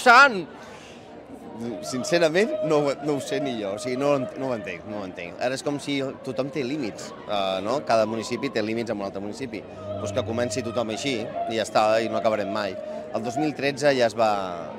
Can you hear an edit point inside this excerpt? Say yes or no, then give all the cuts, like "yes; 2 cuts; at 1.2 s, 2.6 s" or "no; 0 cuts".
no; 0 cuts